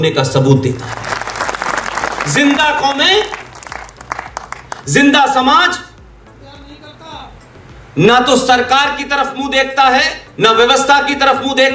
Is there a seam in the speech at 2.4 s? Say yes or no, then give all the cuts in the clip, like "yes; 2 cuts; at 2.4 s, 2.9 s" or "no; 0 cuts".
no; 2 cuts; at 1.0 s, 10.2 s